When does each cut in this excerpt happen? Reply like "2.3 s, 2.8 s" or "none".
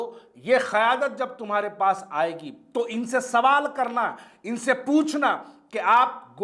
none